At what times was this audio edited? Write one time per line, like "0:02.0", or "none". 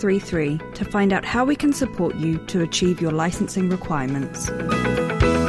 0:04.5